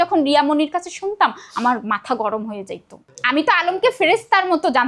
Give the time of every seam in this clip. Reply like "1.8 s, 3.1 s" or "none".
3.2 s